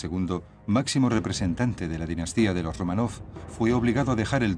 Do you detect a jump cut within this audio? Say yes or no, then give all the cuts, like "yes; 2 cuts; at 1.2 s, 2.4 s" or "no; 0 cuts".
no; 0 cuts